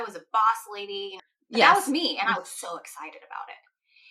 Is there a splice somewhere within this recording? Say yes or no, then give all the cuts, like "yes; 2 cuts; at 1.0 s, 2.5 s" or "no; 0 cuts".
yes; 1 cut; at 1.2 s